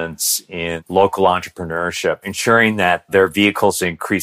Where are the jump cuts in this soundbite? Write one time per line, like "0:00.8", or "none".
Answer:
0:00.8
0:02.3